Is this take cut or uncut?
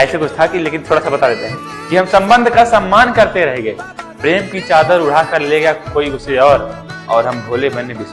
uncut